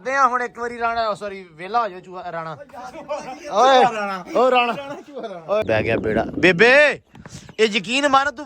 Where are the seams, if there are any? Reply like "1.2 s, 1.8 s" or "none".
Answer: 5.6 s

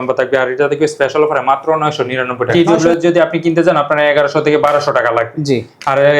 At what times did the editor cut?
2.5 s

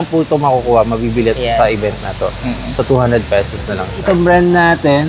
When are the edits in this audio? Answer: 4.0 s

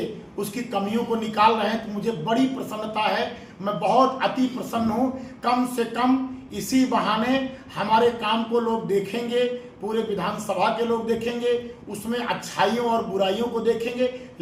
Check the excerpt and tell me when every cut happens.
none

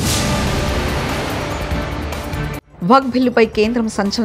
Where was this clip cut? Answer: 2.3 s

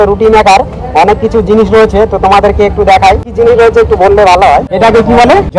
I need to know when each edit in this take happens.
none

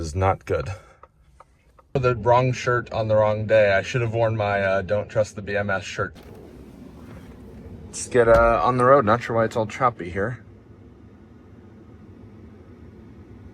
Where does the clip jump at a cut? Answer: 2.0 s, 6.2 s

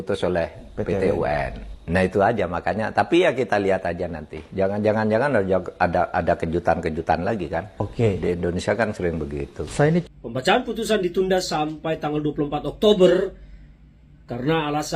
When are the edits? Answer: 10.0 s

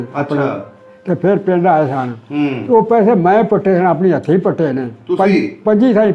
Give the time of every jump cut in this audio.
none

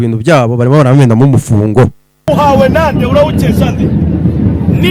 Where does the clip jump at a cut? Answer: 2.1 s

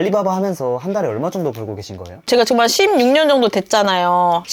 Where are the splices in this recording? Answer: none

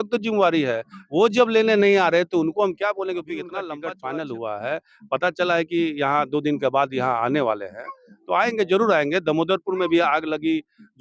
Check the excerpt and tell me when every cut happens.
3.6 s

